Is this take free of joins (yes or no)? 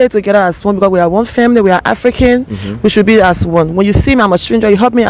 yes